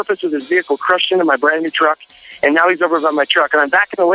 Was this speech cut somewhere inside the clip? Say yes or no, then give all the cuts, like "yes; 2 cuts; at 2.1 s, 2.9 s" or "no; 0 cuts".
no; 0 cuts